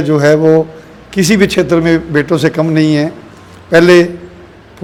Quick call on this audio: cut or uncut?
uncut